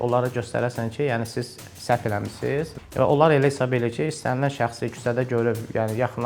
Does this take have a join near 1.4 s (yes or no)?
no